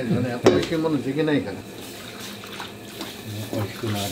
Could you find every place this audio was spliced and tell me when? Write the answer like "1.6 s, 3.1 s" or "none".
none